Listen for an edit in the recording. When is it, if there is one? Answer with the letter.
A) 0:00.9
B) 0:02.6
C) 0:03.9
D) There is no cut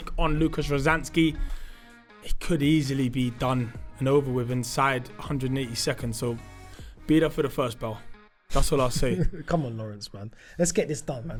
D